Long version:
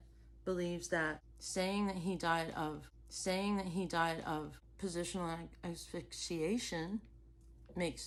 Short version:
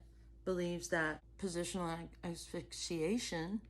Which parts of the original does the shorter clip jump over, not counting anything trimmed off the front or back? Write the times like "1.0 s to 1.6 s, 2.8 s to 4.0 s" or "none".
1.3 s to 4.7 s